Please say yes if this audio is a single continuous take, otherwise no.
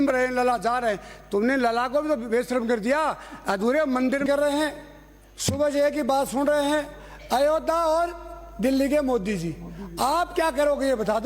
no